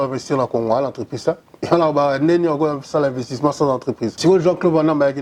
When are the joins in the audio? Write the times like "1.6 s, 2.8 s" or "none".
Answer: 4.1 s

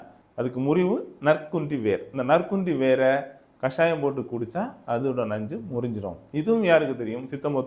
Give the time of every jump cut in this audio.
none

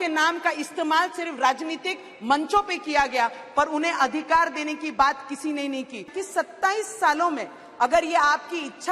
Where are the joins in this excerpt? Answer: 6.1 s

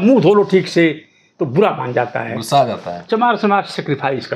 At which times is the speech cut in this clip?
3.0 s

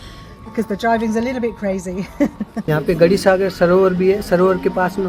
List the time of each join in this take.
2.6 s

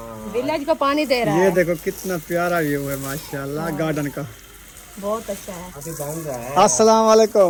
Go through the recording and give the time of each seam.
none

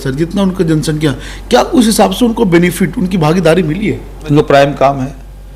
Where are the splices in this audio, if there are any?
4.3 s

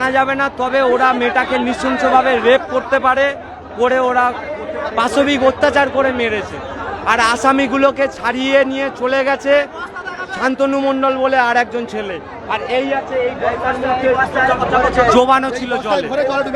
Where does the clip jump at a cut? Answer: none

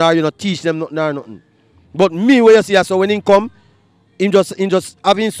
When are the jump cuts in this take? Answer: none

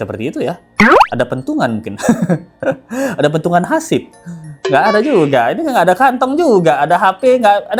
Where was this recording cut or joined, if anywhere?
none

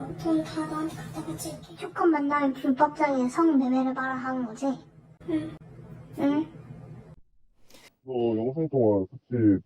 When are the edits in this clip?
7.9 s

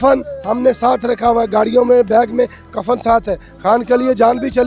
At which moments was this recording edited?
none

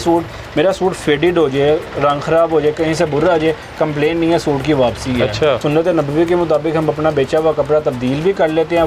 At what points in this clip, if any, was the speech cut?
5.6 s

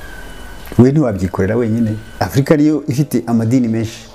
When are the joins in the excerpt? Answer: 2.1 s

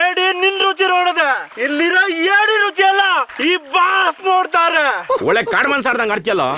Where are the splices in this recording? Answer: 1.5 s, 3.3 s

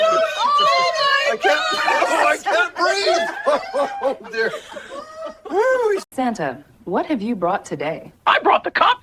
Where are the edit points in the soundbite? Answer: none

